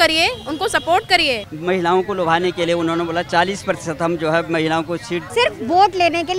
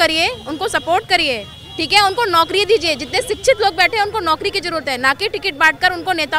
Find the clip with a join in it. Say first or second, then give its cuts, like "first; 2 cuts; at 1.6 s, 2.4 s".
first; 2 cuts; at 1.5 s, 5.3 s